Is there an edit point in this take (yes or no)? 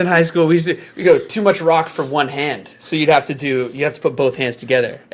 yes